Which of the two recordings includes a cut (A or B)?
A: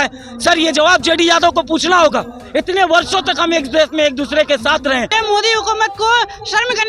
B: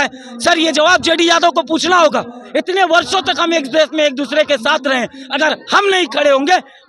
A